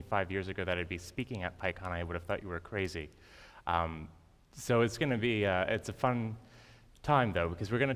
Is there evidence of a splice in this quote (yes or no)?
no